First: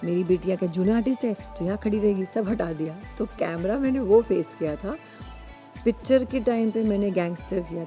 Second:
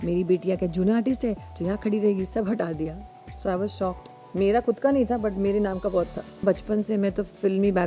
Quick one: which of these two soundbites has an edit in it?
second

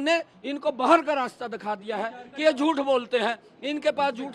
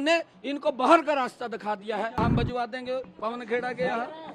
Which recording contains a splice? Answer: second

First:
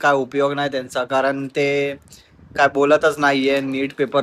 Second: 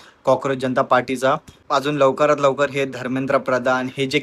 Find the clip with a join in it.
second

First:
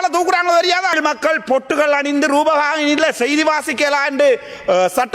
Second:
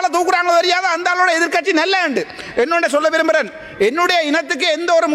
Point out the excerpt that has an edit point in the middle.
first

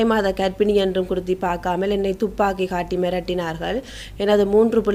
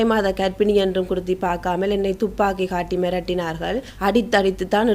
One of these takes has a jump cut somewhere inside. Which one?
second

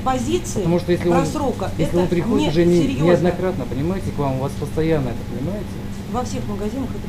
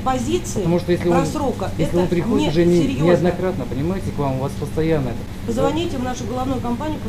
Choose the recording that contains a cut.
second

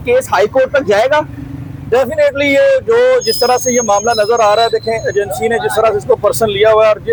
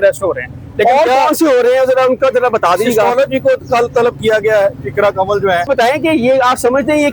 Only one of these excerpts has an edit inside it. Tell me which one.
second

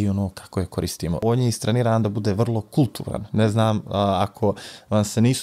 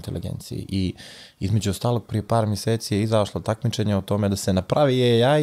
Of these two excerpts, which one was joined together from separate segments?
first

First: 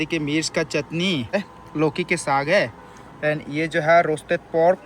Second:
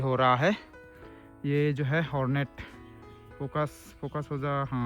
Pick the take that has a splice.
first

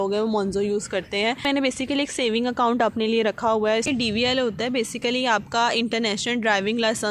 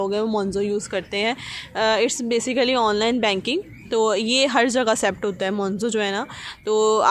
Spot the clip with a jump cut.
first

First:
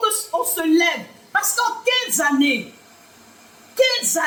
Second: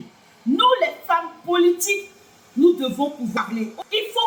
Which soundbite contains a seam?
second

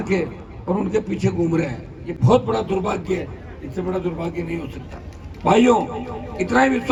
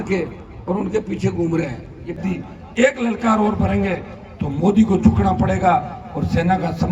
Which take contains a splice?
second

